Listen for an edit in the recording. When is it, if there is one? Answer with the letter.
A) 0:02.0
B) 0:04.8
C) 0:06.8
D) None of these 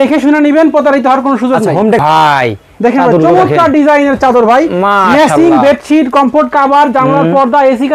A